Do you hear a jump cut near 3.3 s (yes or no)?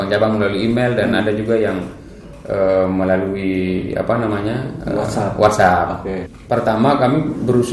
no